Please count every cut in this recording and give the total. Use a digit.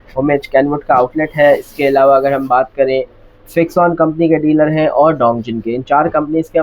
0